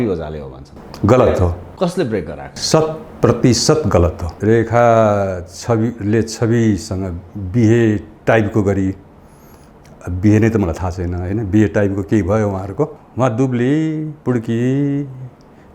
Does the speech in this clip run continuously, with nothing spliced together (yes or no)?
no